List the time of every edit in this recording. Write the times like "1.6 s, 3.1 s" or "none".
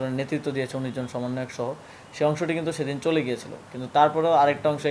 none